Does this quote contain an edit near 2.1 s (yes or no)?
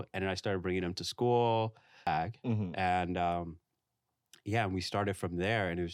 yes